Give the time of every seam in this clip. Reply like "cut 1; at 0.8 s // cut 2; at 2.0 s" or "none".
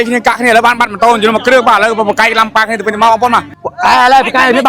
cut 1; at 3.6 s